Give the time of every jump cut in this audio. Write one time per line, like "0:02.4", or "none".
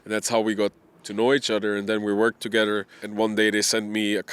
0:03.0